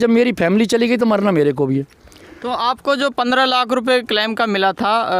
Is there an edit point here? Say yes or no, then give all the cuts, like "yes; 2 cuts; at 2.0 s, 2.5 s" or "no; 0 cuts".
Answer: no; 0 cuts